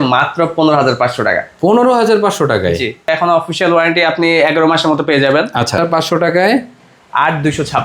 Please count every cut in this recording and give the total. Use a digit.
2